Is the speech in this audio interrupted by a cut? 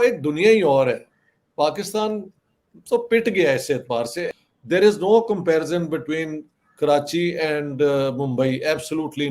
yes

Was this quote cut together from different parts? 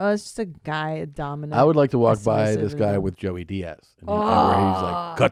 no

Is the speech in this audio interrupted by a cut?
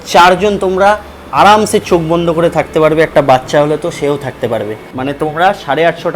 yes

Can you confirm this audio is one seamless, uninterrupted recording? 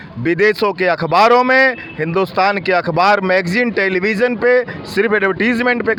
yes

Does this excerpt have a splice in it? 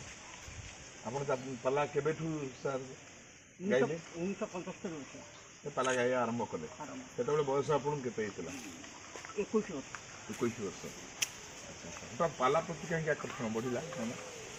no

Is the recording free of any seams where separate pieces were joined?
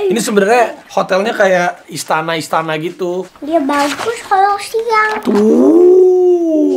no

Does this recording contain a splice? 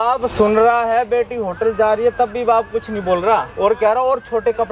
no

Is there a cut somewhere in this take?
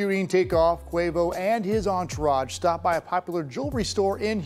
no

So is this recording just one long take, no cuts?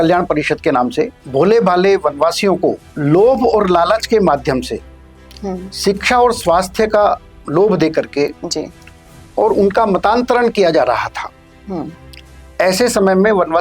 no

